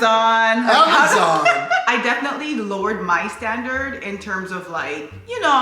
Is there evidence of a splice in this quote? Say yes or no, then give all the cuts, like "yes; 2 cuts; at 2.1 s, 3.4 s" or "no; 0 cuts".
yes; 1 cut; at 1.9 s